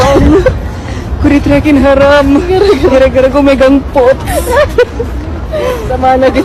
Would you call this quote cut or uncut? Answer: uncut